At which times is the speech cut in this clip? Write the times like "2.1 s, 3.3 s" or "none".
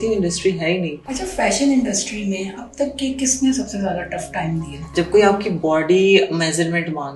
1.0 s, 4.8 s